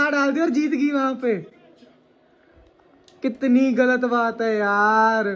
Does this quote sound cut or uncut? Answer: uncut